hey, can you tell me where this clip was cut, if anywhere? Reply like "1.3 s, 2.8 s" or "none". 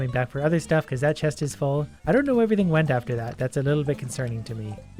1.9 s